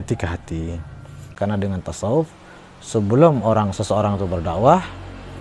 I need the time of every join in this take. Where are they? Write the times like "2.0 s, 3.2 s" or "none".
1.3 s